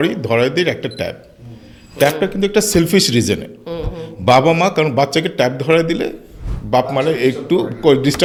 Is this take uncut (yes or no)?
yes